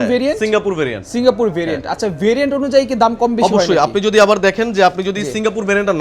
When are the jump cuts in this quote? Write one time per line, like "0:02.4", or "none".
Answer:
none

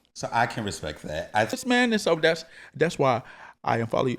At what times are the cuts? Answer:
0:01.6

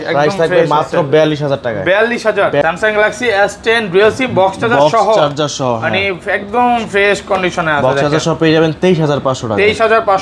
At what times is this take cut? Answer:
0:02.6

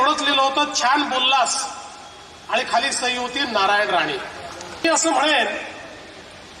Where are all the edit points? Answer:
0:04.8

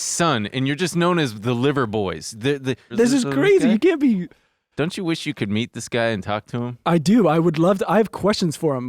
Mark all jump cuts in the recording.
0:02.9

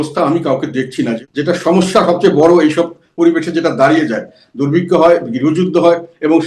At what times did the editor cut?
0:01.2

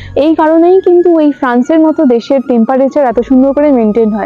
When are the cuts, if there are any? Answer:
none

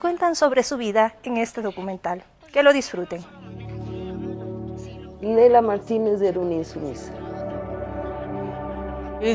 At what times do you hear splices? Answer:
0:03.7

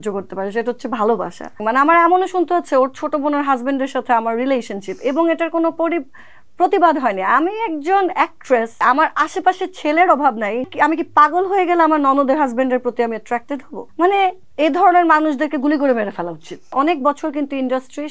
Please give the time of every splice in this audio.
0:01.6
0:08.8
0:10.7
0:13.8
0:14.4
0:16.7

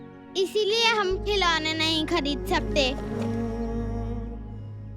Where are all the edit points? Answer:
0:03.0

